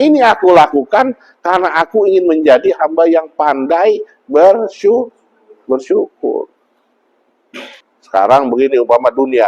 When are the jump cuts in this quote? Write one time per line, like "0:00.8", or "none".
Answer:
0:07.9